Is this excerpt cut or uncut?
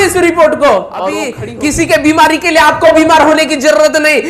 cut